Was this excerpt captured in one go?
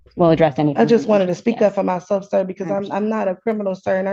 yes; 0 cuts

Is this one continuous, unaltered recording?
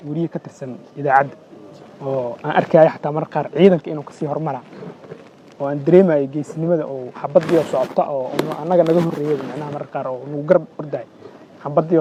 yes; 0 cuts

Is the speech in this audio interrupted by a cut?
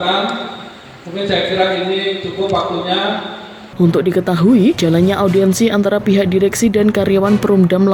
no; 0 cuts

